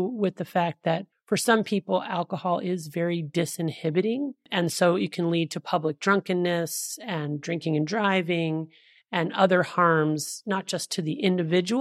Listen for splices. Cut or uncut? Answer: cut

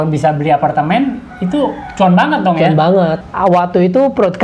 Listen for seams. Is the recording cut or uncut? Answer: cut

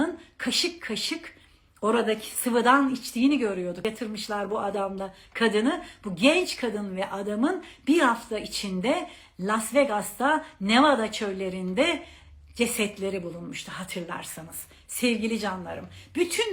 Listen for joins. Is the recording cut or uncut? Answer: uncut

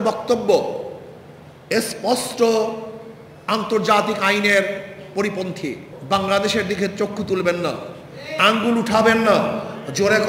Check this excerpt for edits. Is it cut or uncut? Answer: cut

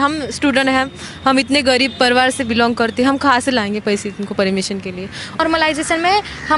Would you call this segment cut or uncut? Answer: cut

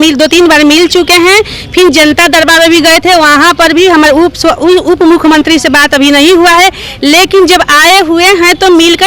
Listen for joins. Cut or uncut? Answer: uncut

